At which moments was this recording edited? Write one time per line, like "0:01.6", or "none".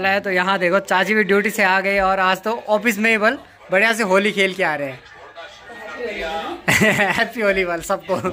none